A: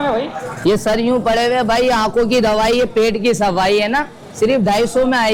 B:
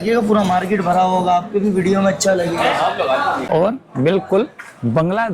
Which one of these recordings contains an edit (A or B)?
B